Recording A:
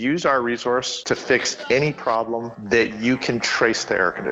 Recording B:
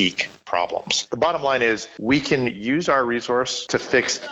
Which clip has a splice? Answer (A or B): B